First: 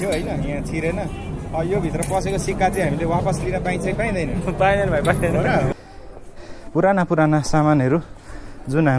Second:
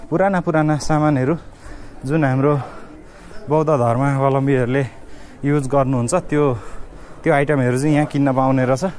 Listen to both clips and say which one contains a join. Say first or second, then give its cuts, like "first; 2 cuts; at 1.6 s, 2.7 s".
first; 1 cut; at 5.7 s